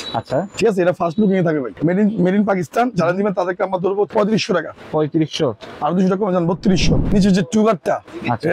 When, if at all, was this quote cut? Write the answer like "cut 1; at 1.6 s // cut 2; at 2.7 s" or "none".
cut 1; at 1.8 s // cut 2; at 4.1 s // cut 3; at 7.1 s